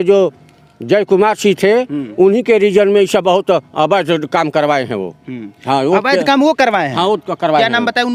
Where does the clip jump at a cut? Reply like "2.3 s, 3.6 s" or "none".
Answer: none